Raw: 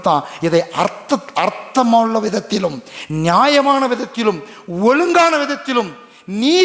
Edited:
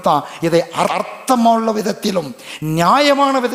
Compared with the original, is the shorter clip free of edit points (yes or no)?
no